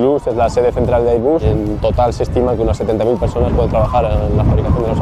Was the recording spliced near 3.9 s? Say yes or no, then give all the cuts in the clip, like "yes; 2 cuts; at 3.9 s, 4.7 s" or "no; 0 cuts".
no; 1 cut; at 1.6 s